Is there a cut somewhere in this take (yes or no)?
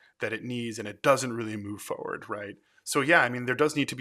no